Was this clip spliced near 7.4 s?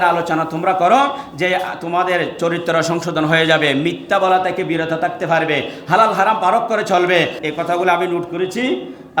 yes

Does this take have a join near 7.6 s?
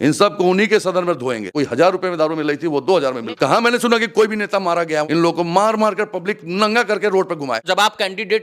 yes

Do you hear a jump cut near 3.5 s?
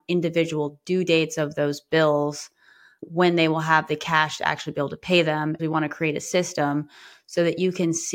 no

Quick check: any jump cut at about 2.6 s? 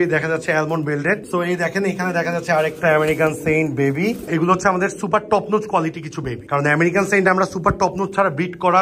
no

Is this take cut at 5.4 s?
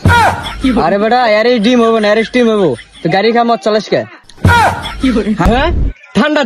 yes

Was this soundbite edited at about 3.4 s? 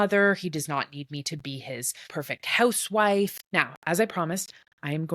yes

